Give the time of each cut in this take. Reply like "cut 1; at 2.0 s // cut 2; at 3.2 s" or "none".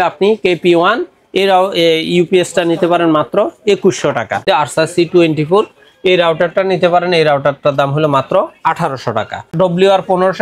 cut 1; at 4.4 s // cut 2; at 9.5 s